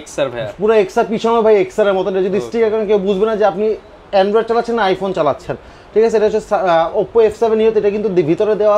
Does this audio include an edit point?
no; 0 cuts

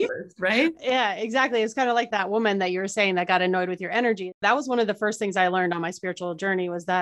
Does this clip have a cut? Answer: yes; 2 cuts; at 2.1 s, 4.3 s

